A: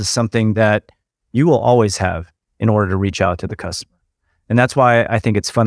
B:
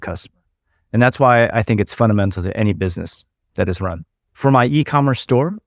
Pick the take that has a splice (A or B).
B